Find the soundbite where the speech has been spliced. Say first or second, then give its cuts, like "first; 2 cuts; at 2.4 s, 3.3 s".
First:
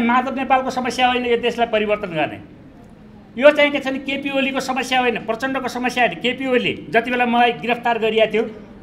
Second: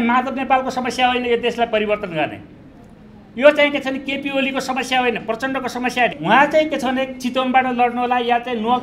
second; 1 cut; at 6.2 s